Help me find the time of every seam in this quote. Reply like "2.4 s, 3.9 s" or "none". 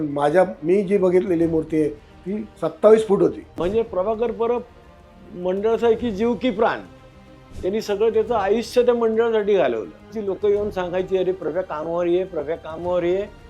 2.5 s, 3.6 s, 10.1 s